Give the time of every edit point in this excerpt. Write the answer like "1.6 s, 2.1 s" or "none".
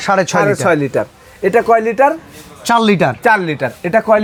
none